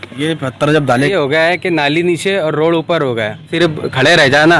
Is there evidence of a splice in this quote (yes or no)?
yes